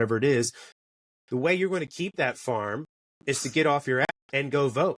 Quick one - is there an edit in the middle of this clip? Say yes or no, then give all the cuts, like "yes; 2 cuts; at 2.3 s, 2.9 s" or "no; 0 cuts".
yes; 1 cut; at 4.1 s